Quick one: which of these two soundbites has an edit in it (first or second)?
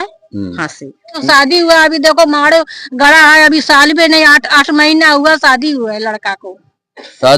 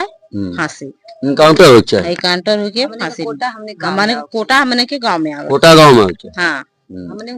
first